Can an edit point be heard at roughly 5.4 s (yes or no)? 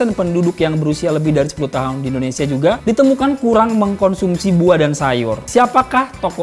yes